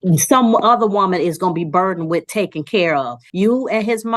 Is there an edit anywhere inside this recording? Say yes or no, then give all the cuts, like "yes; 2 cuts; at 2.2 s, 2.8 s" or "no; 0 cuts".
yes; 1 cut; at 3.2 s